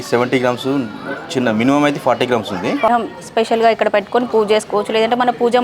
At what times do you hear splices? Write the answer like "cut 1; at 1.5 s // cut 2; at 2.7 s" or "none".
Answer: cut 1; at 2.9 s